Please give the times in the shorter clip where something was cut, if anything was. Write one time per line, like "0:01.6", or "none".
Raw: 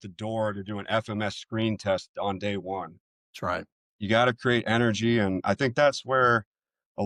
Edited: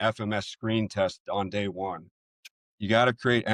0:02.5